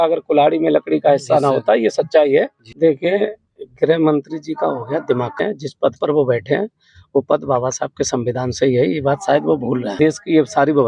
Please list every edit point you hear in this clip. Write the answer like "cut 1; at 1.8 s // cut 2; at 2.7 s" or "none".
cut 1; at 2.6 s // cut 2; at 5.4 s // cut 3; at 9.9 s